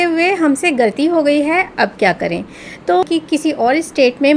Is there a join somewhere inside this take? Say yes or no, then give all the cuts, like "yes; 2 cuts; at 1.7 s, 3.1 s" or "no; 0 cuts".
yes; 1 cut; at 3.0 s